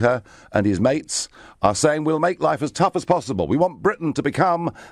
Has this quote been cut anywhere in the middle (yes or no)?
no